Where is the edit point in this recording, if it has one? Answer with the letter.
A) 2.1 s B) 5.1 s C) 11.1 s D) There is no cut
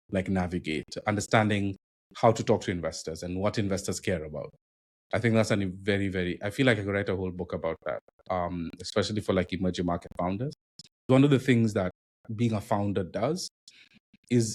C